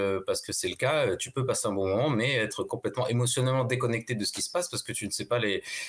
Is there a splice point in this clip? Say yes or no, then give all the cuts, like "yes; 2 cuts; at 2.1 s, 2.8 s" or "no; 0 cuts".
no; 0 cuts